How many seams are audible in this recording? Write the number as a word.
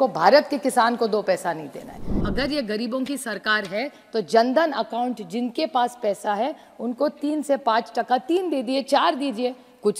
one